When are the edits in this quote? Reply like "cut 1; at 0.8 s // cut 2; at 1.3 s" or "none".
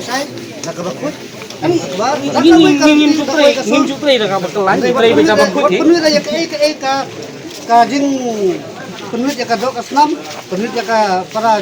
none